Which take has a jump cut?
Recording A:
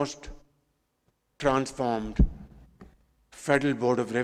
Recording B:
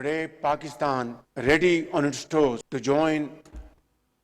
B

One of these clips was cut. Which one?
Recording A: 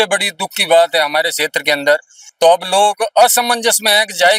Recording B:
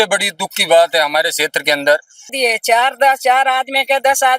B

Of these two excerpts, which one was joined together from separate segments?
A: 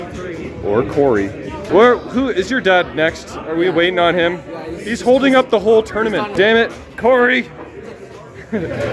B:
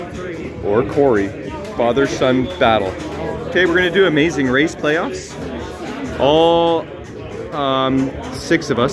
A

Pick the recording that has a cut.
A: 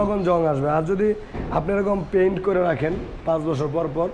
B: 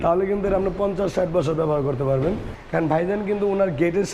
B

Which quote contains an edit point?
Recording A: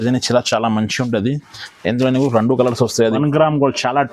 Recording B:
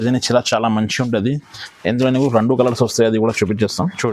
A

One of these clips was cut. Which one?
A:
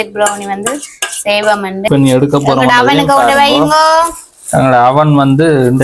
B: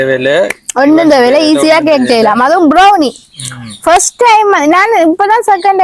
A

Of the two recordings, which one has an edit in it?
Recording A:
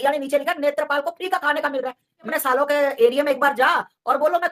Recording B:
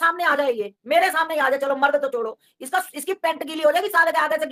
A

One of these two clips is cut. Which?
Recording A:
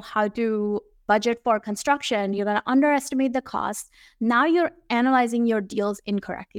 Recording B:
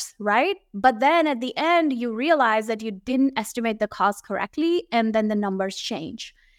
A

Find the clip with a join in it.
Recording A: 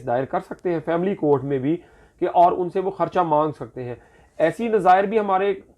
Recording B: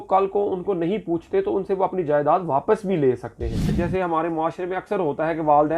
B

